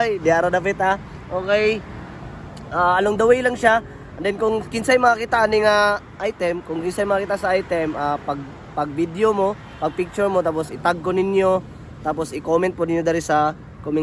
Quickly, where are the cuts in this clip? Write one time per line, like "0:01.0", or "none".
none